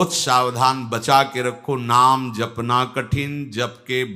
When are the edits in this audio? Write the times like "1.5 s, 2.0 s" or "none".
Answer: none